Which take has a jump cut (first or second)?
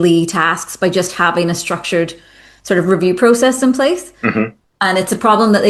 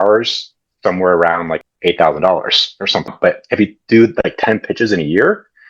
second